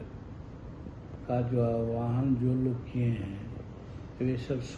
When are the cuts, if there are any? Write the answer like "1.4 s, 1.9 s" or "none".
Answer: none